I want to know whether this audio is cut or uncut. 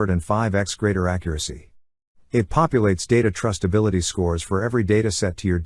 uncut